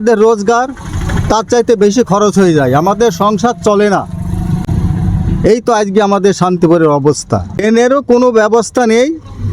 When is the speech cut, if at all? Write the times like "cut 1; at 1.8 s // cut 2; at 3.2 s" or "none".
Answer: cut 1; at 7.6 s